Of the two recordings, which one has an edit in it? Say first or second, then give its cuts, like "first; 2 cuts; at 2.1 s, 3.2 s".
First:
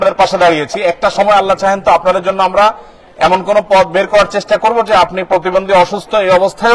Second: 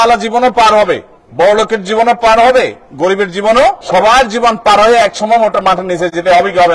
second; 1 cut; at 3.8 s